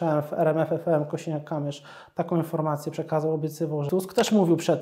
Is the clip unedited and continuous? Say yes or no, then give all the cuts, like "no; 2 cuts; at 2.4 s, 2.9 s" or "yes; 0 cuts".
no; 1 cut; at 3.9 s